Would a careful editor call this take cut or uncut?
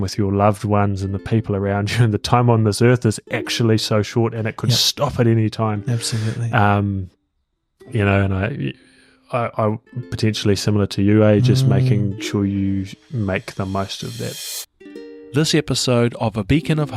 cut